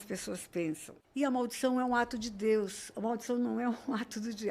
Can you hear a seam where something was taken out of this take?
yes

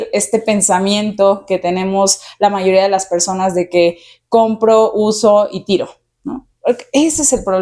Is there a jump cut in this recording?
no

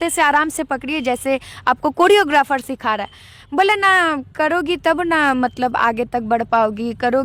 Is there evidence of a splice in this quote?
no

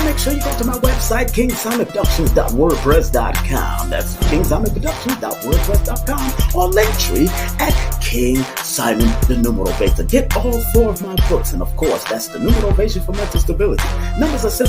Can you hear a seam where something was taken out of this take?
yes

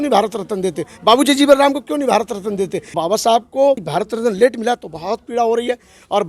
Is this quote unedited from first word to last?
no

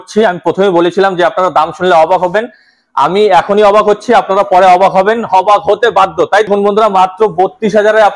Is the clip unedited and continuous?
no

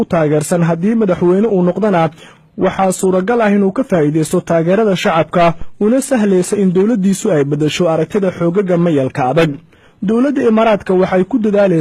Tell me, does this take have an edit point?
no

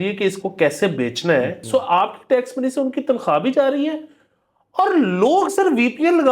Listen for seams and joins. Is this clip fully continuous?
no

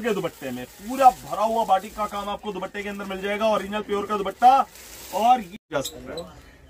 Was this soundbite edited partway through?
yes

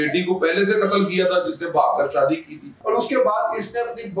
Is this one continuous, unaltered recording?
no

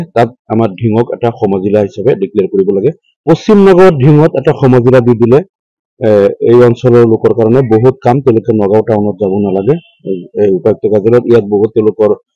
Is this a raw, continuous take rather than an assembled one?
no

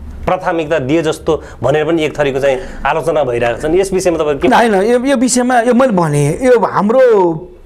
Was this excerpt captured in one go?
yes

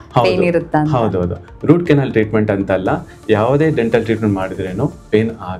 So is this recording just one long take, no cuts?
yes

